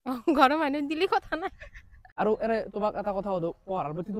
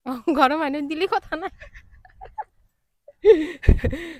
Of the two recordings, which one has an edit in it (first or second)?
first